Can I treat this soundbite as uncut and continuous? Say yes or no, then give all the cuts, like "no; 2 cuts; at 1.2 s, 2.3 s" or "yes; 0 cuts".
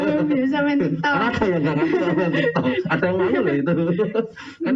yes; 0 cuts